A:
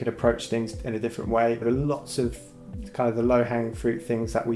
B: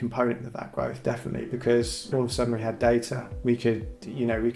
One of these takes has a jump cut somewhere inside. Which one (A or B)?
A